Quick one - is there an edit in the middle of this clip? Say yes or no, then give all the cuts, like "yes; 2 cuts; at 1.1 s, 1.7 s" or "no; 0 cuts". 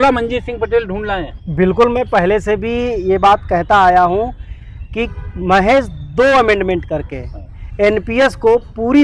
no; 0 cuts